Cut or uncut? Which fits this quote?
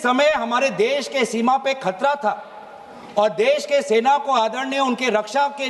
uncut